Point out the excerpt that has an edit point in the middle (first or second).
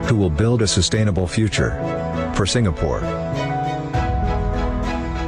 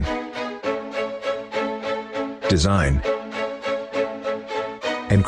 second